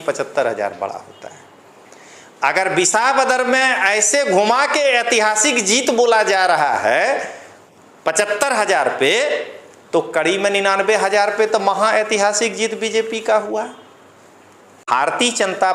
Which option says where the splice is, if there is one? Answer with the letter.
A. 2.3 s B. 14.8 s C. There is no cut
B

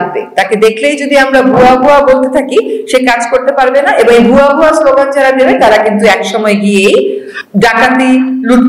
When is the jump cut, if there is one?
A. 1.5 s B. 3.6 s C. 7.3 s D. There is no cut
D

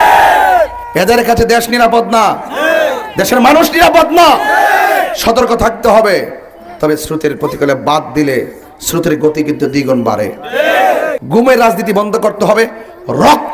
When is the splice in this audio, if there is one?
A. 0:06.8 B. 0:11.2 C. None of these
B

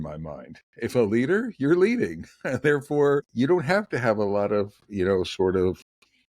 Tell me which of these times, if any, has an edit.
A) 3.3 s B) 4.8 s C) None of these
A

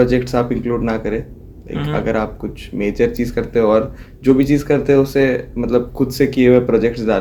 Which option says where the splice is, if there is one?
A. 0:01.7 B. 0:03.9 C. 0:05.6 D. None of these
D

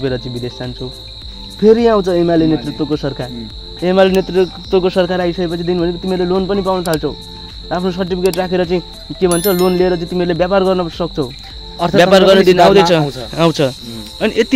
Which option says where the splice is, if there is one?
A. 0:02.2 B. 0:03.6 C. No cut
C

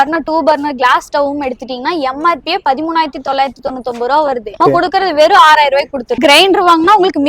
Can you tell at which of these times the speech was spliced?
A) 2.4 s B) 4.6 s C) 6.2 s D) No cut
C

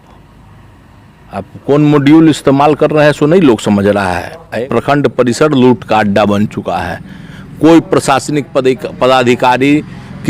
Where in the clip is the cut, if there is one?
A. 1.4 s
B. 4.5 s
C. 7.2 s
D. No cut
B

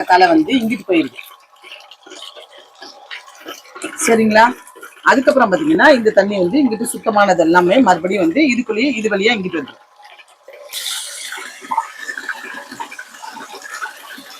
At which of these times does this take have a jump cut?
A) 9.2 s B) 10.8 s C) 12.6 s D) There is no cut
B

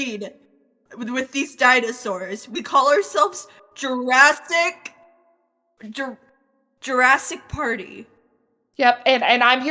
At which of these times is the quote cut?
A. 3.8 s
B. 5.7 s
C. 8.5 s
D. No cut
D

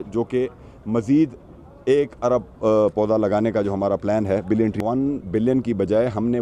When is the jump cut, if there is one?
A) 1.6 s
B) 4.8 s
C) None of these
B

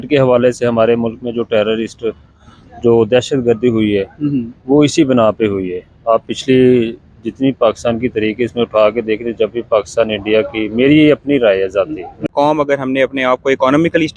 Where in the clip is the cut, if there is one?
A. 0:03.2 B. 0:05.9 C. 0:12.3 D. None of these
C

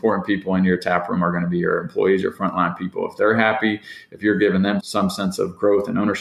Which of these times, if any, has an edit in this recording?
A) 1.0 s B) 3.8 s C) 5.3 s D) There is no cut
D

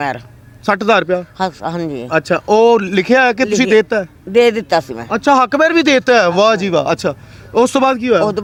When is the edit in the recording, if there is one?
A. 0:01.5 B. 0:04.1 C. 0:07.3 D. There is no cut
D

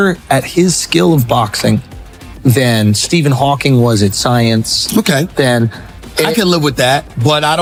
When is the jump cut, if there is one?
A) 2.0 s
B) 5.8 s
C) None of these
C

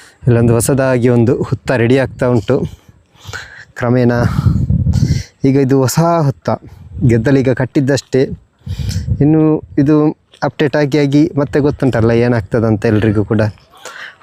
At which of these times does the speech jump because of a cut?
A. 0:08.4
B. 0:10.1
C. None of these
C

